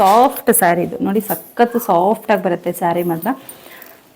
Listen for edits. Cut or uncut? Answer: uncut